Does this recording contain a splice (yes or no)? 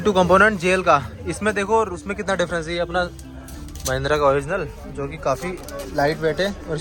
no